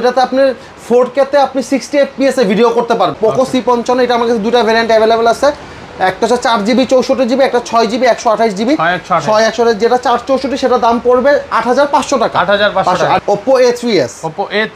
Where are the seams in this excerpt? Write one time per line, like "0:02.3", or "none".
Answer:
0:03.1
0:13.2